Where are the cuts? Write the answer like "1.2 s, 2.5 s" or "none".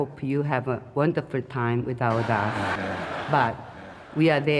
none